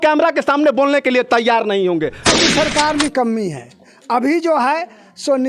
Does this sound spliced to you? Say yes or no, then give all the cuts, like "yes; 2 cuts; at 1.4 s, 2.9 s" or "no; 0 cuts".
yes; 1 cut; at 2.2 s